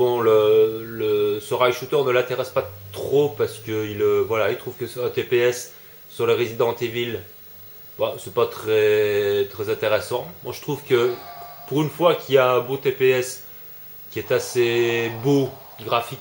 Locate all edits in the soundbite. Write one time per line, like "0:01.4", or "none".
none